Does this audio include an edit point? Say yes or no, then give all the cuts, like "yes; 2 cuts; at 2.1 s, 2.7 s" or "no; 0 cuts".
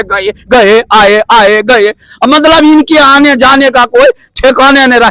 no; 0 cuts